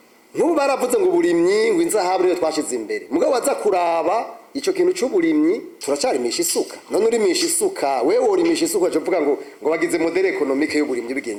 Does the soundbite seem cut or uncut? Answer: uncut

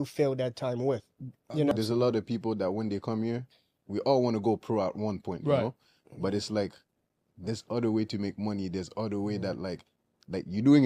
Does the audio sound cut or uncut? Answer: cut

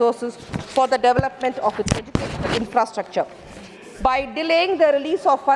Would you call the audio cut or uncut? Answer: uncut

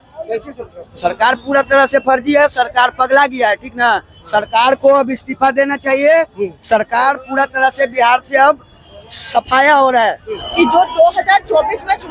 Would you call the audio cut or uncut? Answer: cut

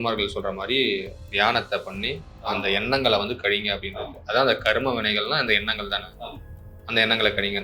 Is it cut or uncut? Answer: uncut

